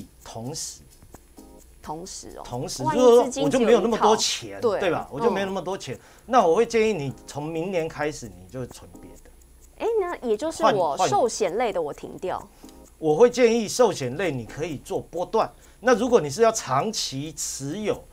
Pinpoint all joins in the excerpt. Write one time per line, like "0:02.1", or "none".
0:15.6